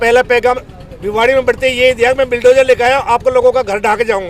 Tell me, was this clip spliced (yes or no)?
no